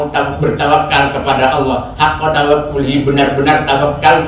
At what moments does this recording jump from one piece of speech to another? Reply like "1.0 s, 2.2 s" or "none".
none